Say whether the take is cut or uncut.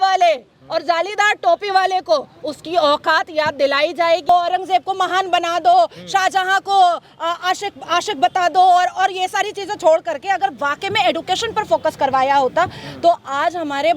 cut